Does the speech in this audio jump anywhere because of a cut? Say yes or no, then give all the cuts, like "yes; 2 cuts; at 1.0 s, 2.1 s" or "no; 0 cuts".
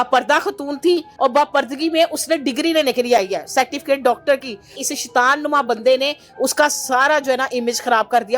yes; 2 cuts; at 1.1 s, 4.8 s